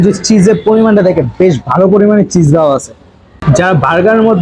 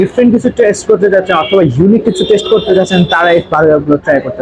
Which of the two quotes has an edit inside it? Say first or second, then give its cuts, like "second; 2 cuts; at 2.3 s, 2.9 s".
first; 1 cut; at 3.4 s